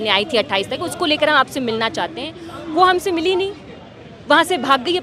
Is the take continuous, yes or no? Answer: yes